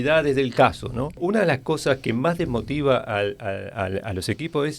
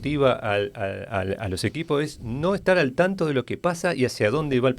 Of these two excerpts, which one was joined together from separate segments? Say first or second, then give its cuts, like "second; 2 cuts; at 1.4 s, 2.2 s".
first; 1 cut; at 1.2 s